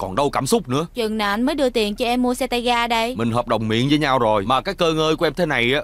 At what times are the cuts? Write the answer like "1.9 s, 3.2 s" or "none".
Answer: 0.9 s, 3.1 s, 4.4 s